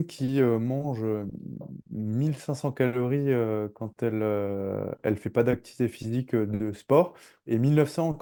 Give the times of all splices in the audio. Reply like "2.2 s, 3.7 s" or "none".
none